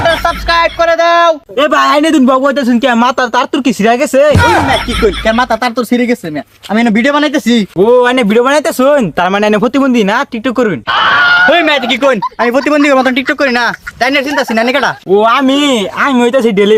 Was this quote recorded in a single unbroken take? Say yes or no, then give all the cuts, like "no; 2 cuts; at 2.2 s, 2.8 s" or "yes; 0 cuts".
yes; 0 cuts